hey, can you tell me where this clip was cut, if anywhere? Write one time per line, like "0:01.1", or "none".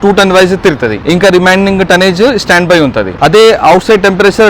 0:03.1

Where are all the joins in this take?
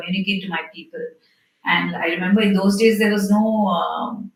none

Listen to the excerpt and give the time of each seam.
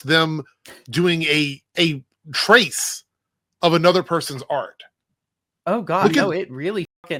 none

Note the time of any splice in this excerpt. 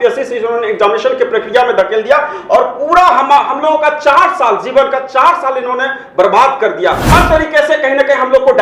0:07.0

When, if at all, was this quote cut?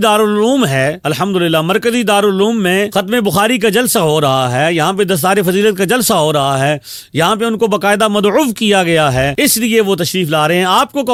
none

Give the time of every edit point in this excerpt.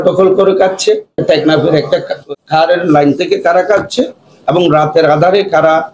0:01.2
0:02.2

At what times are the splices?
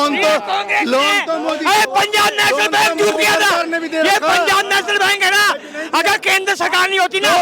none

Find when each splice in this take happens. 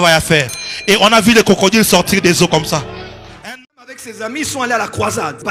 0:03.4

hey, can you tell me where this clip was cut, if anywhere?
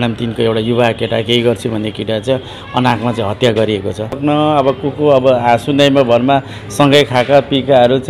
0:04.2

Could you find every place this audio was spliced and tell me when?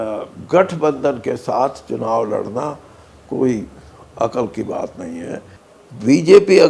0:05.6

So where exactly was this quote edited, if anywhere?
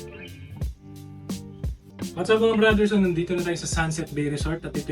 0:01.8

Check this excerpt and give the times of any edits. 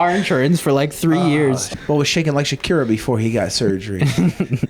0:01.7

